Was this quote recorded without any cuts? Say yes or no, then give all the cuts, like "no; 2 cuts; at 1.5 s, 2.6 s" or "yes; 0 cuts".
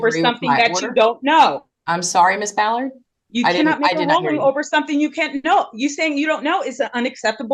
yes; 0 cuts